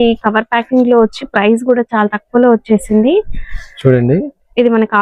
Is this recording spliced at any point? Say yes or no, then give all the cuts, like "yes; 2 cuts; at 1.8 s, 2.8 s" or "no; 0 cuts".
no; 0 cuts